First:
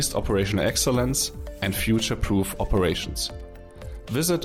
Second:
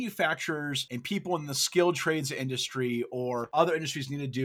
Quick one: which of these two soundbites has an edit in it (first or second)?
second